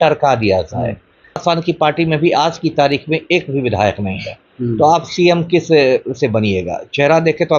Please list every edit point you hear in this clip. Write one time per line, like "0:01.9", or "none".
0:01.4